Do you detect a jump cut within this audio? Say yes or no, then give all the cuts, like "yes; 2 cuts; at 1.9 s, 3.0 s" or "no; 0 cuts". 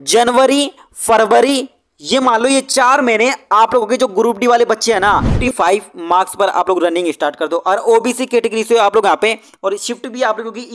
yes; 1 cut; at 5.4 s